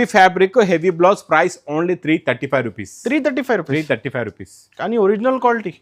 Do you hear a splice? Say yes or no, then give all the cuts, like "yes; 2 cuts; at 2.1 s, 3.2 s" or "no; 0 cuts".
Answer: no; 0 cuts